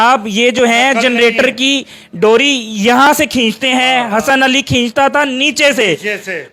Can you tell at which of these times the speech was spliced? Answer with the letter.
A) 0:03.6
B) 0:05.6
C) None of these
C